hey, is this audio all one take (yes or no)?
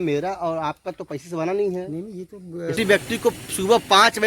no